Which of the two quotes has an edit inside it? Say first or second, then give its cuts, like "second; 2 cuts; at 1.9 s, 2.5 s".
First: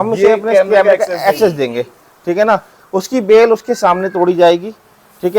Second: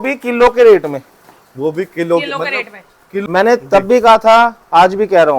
second; 1 cut; at 3.2 s